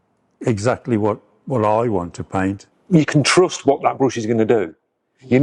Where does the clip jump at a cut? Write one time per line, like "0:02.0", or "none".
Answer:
0:02.7